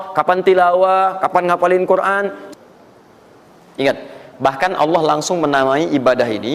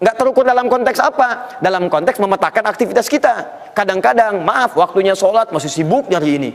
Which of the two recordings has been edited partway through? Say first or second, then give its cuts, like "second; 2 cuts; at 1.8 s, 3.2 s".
first; 1 cut; at 2.4 s